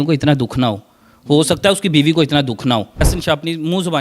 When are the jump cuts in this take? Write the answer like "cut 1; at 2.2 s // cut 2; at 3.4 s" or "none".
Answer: cut 1; at 3.1 s